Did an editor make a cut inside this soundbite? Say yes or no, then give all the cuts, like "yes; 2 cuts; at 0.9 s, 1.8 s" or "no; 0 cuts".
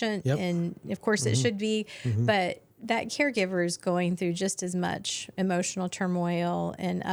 no; 0 cuts